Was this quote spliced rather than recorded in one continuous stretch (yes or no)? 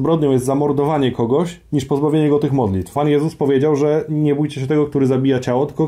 yes